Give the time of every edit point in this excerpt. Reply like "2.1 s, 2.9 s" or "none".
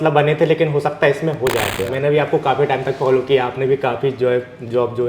1.7 s